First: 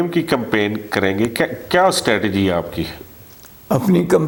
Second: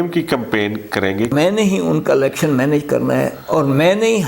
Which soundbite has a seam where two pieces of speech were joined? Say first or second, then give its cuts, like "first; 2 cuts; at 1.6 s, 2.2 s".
second; 1 cut; at 1.3 s